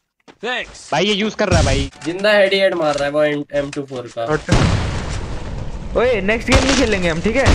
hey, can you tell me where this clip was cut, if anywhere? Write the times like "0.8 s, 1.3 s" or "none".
1.9 s